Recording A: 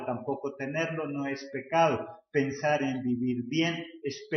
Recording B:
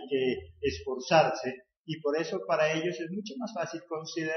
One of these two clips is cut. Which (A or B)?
B